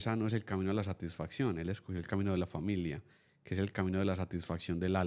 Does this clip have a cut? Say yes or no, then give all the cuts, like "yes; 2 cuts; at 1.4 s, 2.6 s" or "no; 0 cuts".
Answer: no; 0 cuts